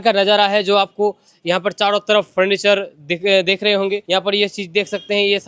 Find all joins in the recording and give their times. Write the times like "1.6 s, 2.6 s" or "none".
none

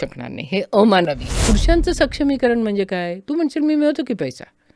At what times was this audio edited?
1.3 s

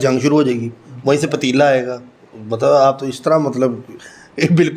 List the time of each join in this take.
none

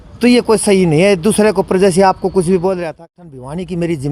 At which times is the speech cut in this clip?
2.9 s

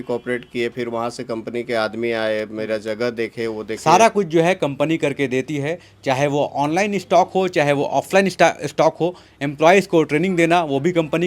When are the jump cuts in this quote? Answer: 3.7 s

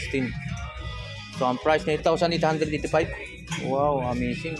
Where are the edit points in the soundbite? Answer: 2.0 s

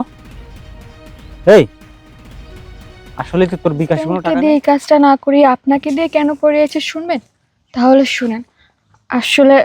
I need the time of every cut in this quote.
4.2 s

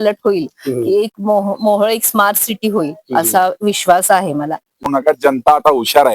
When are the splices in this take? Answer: 5.2 s

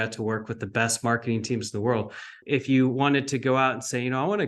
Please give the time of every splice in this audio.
2.4 s

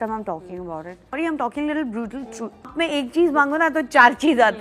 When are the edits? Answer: 1.1 s, 2.7 s

